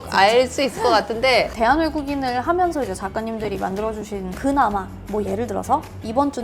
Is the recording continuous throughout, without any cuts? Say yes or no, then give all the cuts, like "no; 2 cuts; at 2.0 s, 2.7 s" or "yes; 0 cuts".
no; 2 cuts; at 1.5 s, 4.3 s